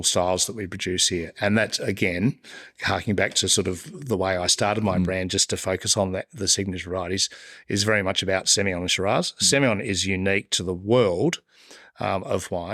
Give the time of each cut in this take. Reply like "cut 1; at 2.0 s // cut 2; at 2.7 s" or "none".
none